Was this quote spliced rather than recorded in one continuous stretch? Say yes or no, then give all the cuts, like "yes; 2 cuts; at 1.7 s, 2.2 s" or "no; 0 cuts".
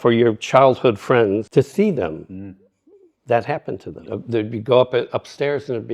yes; 2 cuts; at 1.5 s, 4.1 s